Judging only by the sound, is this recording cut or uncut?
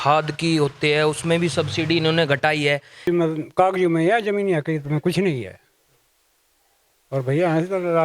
cut